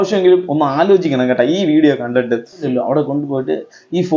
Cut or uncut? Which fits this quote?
cut